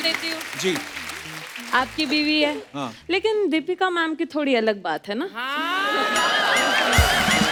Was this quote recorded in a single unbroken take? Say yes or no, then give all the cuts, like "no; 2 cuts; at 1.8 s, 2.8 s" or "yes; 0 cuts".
yes; 0 cuts